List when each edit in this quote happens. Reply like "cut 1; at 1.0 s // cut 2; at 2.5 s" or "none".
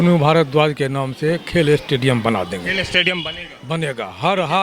none